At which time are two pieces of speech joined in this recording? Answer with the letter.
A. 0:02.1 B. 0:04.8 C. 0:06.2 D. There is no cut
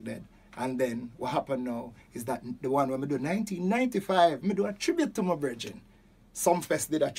D